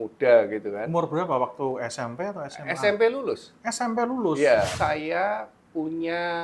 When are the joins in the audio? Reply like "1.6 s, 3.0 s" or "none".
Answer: 4.7 s